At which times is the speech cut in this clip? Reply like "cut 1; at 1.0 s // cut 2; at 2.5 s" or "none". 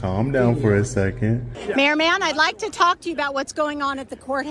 cut 1; at 1.4 s